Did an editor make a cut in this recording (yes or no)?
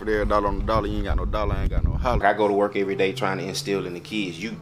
yes